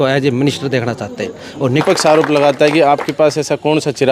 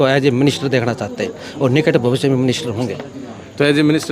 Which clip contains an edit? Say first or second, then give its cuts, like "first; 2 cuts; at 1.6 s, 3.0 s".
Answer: first; 1 cut; at 1.8 s